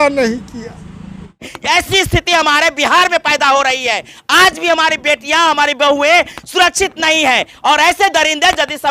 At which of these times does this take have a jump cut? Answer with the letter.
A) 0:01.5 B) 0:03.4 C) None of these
A